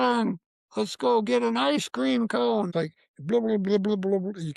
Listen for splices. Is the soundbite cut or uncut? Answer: cut